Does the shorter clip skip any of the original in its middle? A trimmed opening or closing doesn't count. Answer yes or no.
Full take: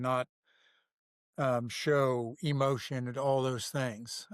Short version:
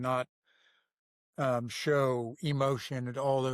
no